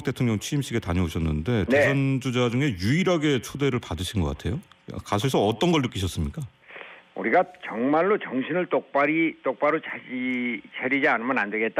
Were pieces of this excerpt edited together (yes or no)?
no